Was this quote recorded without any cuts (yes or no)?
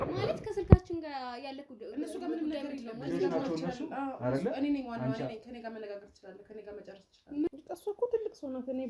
no